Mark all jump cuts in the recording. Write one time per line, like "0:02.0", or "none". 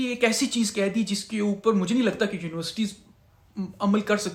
none

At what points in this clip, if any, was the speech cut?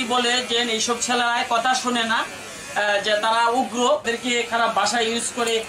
0:04.1

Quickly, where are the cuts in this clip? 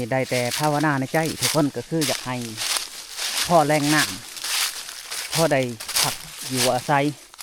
none

